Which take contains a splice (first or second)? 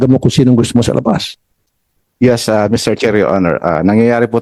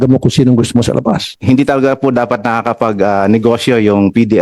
second